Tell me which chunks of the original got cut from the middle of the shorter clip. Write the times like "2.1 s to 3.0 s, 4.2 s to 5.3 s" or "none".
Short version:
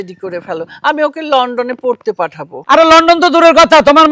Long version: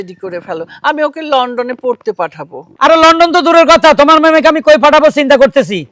2.5 s to 2.6 s